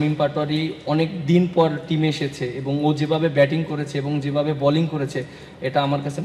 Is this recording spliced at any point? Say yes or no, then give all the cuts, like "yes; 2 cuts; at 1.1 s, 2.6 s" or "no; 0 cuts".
no; 0 cuts